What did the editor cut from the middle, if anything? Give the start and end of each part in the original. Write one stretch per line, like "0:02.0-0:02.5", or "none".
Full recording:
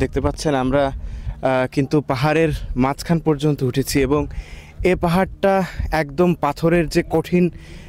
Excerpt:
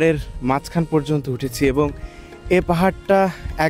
none